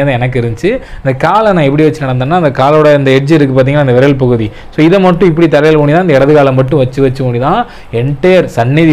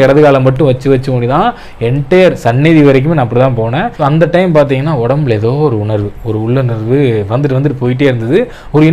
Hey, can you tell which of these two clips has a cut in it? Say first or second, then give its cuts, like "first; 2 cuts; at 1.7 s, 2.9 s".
second; 1 cut; at 3.9 s